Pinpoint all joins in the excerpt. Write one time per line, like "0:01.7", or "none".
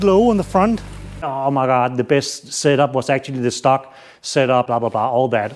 0:01.3